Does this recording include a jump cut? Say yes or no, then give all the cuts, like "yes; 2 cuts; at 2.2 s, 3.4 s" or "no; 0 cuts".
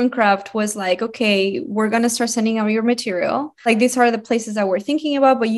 yes; 1 cut; at 3.7 s